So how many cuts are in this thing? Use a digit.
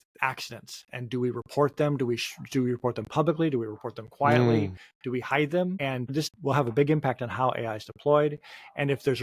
1